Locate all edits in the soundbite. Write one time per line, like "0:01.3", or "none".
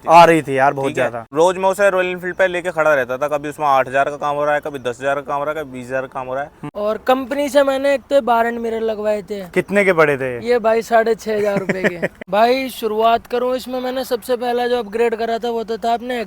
0:01.2
0:06.6
0:12.1